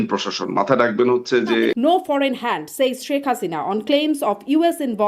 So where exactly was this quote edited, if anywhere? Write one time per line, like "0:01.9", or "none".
0:01.8